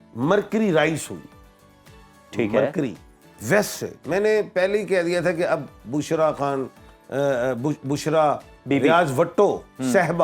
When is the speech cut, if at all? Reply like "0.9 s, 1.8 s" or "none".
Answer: none